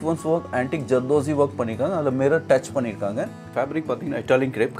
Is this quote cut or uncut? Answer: cut